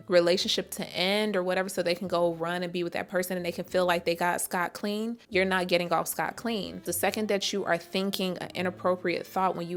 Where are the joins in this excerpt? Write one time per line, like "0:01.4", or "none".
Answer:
none